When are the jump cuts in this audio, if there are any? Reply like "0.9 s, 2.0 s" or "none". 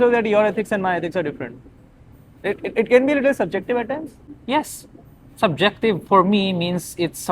2.4 s, 4.2 s